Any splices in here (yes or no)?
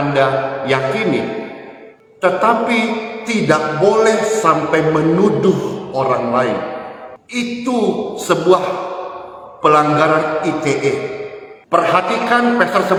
no